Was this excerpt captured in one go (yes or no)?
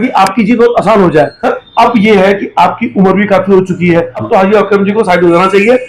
no